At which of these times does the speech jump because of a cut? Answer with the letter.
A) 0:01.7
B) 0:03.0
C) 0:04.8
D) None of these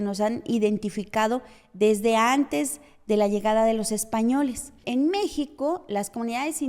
C